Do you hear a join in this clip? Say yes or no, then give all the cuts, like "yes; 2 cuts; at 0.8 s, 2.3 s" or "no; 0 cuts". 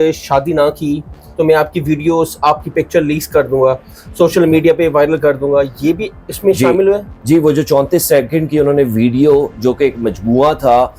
no; 0 cuts